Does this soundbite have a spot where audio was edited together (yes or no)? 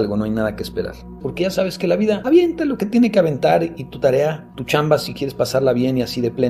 yes